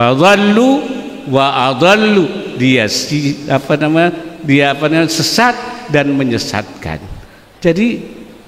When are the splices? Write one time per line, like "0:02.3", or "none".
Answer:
none